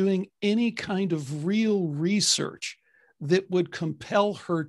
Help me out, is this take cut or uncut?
uncut